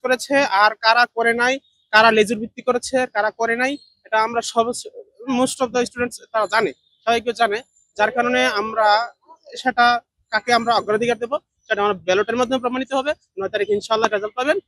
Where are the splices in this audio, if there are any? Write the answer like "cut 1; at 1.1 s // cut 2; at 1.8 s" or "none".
none